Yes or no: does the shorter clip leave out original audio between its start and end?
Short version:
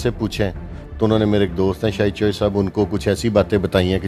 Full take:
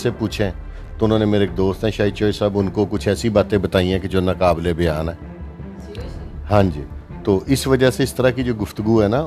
no